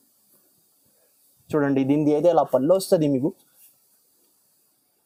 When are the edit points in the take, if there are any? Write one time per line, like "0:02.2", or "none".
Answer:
none